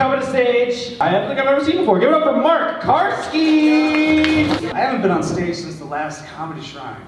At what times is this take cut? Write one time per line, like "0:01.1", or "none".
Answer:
0:00.9
0:04.7